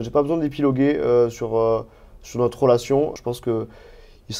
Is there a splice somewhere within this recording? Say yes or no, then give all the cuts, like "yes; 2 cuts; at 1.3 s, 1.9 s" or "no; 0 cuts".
yes; 1 cut; at 3.2 s